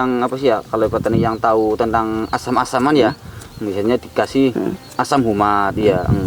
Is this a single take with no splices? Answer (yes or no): yes